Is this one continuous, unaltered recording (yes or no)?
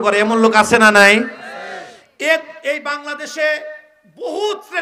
yes